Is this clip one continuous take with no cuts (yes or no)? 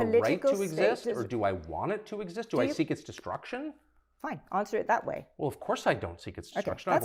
yes